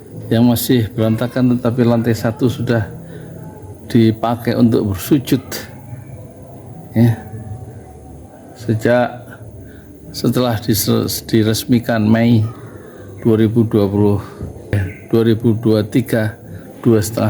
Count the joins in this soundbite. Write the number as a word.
one